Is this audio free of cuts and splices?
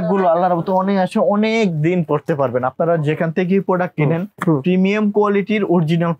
yes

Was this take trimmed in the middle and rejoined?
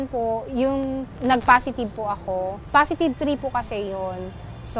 yes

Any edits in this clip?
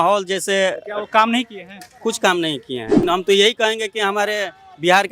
yes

